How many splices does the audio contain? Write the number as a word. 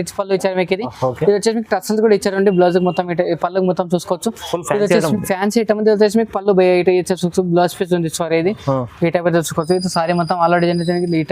zero